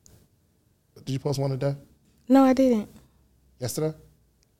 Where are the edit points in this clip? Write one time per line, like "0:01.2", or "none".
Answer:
0:01.0